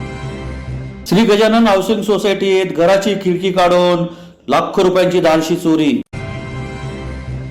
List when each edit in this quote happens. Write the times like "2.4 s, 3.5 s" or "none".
0.9 s